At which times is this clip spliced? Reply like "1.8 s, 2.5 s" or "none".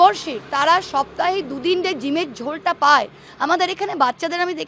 none